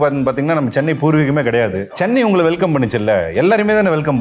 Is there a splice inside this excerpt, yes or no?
yes